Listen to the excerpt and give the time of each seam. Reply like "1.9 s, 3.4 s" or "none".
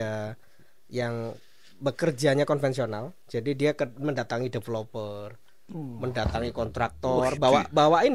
none